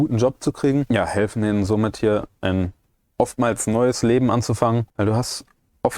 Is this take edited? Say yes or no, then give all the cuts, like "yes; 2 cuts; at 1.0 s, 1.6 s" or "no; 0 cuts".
yes; 2 cuts; at 0.9 s, 4.9 s